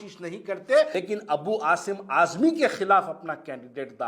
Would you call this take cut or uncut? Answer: cut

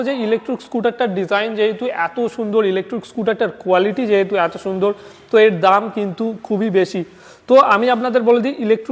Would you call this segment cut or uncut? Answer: uncut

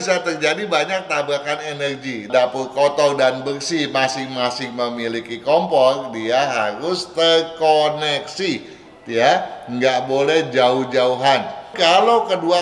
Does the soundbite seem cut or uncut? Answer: cut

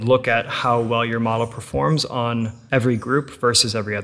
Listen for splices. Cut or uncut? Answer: cut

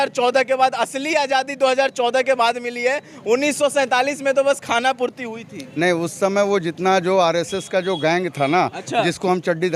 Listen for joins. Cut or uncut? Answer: uncut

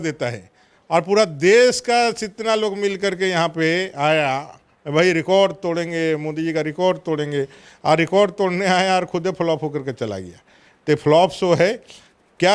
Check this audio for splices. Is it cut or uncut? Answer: uncut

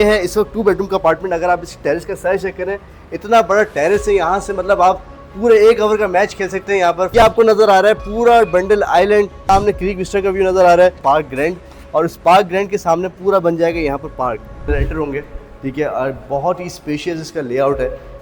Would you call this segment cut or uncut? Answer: cut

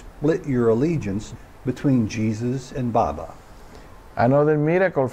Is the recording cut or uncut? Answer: cut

